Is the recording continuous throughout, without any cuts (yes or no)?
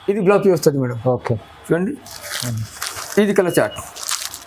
yes